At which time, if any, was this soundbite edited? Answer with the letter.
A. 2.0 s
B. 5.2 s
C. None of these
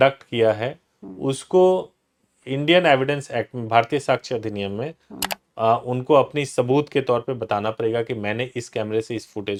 C